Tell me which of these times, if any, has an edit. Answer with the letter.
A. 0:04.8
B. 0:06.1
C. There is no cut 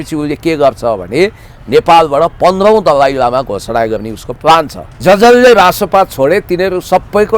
A